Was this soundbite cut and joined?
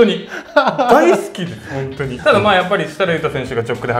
yes; 1 cut; at 2.2 s

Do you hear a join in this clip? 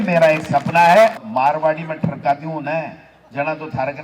yes; 1 cut; at 1.2 s

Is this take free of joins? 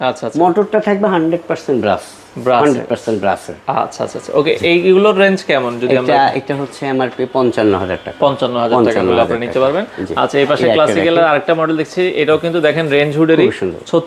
yes; 0 cuts

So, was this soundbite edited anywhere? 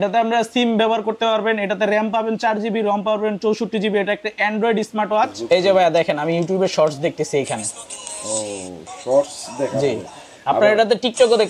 yes; 1 cut; at 5.4 s

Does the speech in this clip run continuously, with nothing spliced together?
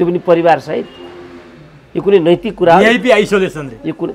yes; 0 cuts

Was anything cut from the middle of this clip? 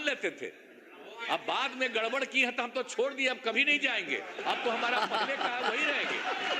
no; 0 cuts

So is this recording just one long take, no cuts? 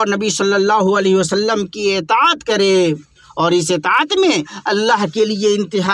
yes; 0 cuts

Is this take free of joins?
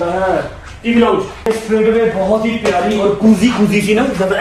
no; 1 cut; at 1.5 s

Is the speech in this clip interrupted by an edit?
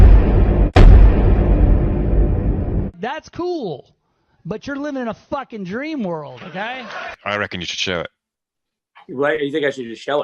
yes; 1 cut; at 1.5 s

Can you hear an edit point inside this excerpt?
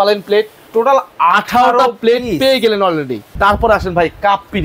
yes; 1 cut; at 3.2 s

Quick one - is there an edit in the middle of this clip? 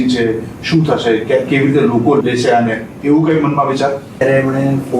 yes; 2 cuts; at 2.2 s, 4.2 s

